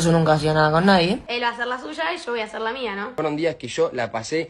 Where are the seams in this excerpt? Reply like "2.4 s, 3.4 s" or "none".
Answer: 1.2 s, 3.1 s